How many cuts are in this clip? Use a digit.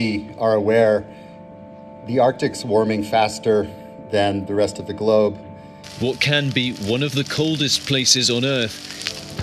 1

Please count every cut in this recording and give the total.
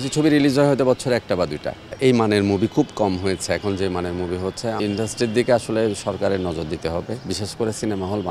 2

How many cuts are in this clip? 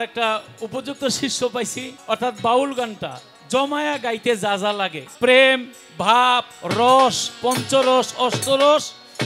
2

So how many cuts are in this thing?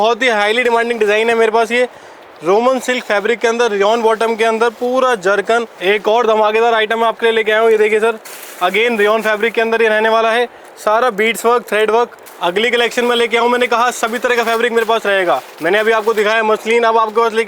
2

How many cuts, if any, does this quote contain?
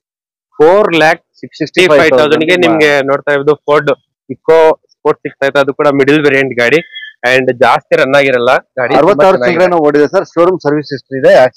0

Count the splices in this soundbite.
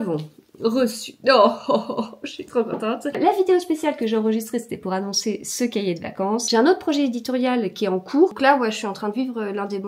3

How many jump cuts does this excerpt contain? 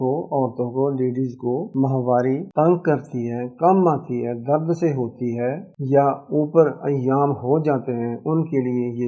2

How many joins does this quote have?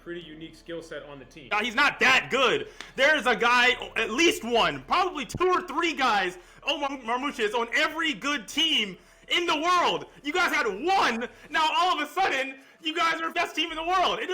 3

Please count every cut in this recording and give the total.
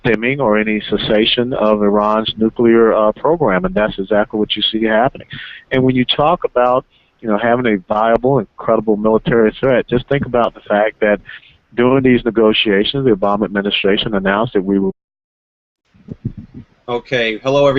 0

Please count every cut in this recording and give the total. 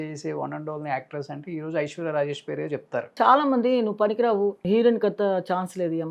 2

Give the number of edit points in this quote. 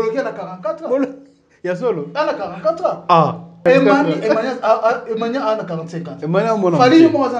1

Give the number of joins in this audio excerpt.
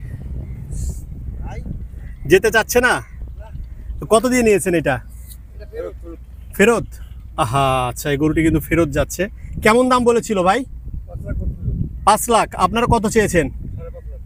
0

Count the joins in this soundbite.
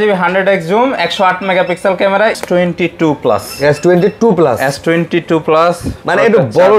1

